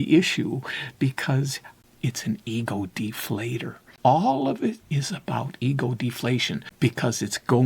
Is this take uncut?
no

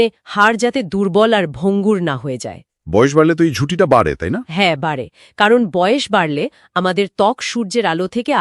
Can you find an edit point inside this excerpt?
no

